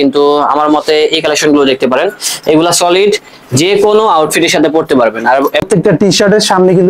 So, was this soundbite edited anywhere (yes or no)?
yes